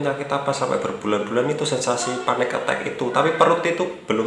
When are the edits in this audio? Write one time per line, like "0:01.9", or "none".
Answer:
none